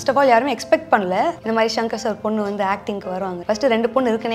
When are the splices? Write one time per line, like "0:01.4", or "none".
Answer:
0:01.4
0:03.4